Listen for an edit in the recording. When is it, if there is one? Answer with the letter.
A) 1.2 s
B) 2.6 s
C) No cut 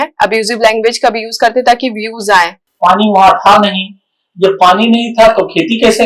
B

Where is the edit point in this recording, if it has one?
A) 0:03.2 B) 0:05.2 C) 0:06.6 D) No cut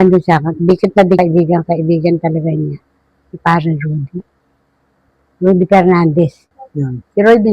C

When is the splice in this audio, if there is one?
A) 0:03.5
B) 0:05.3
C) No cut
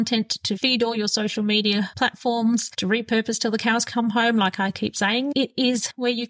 B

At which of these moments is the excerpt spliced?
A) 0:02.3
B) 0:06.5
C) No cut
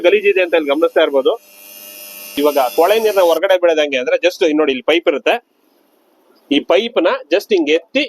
A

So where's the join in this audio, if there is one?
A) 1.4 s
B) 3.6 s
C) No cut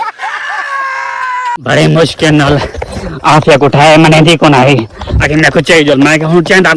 C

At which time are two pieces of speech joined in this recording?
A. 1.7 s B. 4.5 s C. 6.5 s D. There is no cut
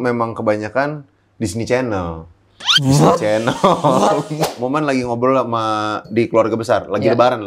B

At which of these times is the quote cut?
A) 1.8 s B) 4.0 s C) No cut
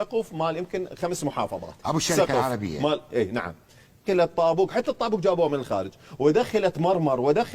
B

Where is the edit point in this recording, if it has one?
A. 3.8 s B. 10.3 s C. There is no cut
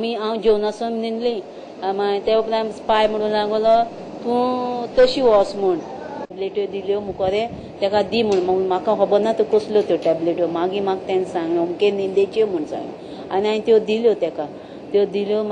A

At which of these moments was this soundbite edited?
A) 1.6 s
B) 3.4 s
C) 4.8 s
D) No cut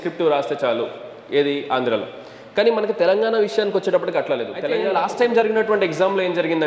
C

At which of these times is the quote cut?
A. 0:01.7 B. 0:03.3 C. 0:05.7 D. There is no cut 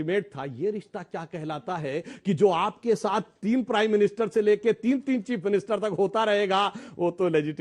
D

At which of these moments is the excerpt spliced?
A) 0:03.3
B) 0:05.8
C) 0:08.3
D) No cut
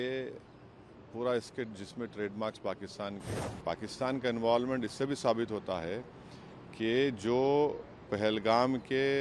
A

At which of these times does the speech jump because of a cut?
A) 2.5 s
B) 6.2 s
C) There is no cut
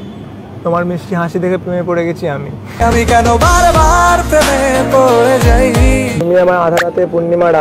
B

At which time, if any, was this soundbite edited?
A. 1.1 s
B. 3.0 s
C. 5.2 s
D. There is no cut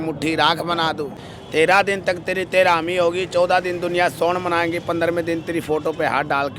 A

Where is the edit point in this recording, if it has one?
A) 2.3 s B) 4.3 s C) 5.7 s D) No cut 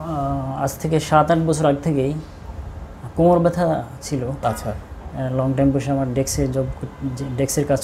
B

